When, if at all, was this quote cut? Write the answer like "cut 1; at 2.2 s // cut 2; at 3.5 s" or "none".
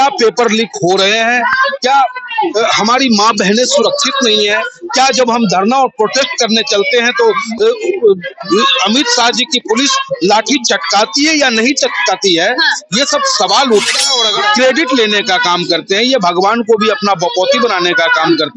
cut 1; at 14.2 s